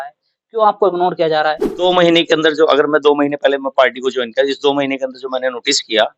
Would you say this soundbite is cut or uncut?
cut